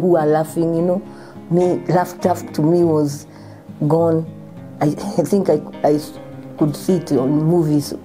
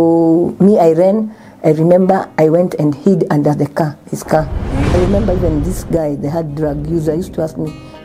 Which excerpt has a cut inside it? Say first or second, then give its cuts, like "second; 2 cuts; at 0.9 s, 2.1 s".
second; 1 cut; at 4.9 s